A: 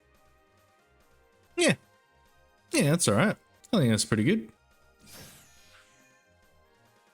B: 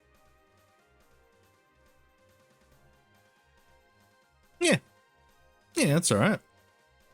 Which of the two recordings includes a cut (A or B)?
A